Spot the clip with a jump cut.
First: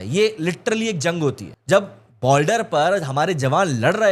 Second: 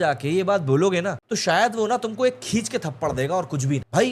first; 1 cut; at 1.5 s

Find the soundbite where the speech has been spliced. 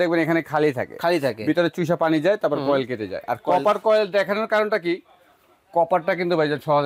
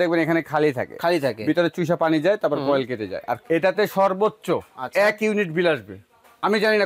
second; 1 cut; at 3.4 s

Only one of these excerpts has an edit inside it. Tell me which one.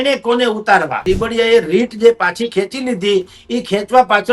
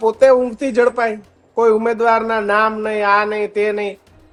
first; 1 cut; at 1.0 s

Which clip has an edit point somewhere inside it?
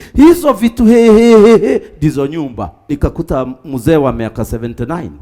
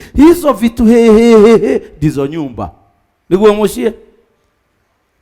first; 1 cut; at 2.9 s

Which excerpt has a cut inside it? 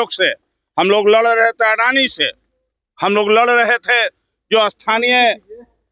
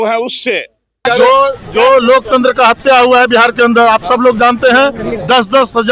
second; 1 cut; at 1.0 s

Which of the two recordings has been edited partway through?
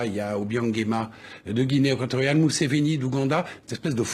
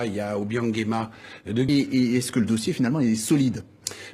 first; 1 cut; at 1.7 s

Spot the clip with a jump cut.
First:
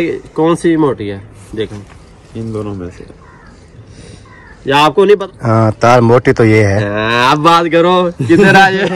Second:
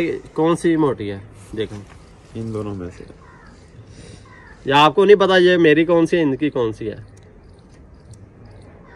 first; 1 cut; at 5.2 s

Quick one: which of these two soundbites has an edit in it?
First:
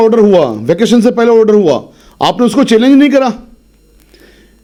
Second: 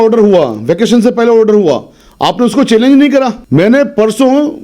second; 1 cut; at 3.4 s

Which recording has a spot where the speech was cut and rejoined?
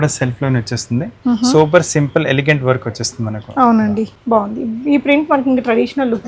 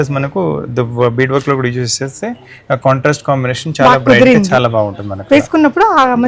first; 1 cut; at 4.2 s

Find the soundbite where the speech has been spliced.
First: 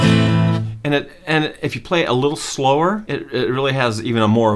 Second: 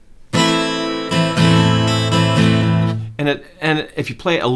first; 1 cut; at 3.1 s

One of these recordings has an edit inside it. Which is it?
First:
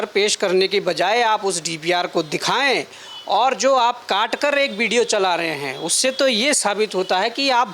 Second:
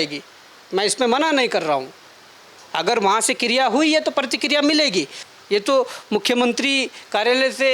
second; 1 cut; at 5.2 s

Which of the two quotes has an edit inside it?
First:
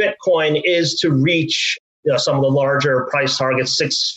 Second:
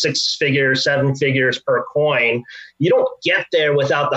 first; 1 cut; at 1.9 s

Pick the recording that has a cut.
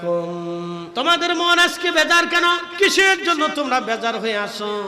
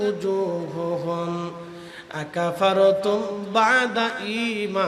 first; 2 cuts; at 0.8 s, 2.7 s

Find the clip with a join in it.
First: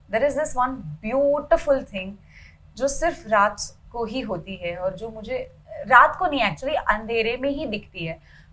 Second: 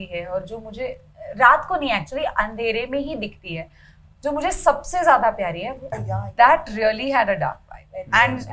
second; 1 cut; at 6.1 s

